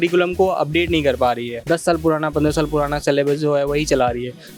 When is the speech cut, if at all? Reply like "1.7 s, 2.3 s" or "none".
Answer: none